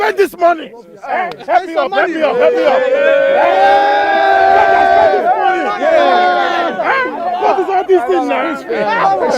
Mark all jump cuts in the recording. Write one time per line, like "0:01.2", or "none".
0:04.8